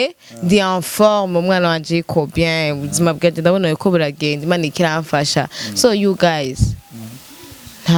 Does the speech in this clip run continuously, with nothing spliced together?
yes; 0 cuts

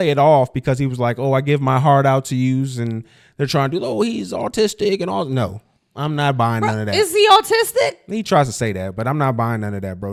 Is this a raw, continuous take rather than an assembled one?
yes; 0 cuts

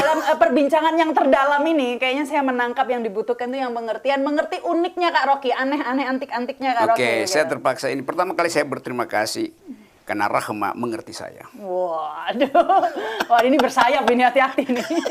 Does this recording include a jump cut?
no; 0 cuts

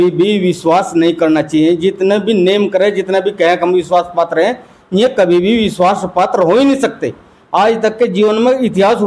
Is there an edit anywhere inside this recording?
no; 0 cuts

